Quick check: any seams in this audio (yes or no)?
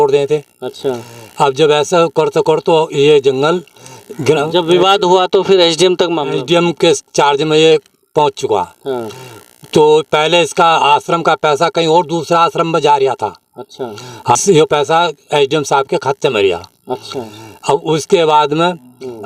yes